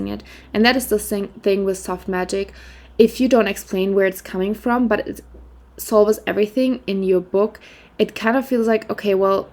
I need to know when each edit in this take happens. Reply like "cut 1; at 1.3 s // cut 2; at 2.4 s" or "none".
none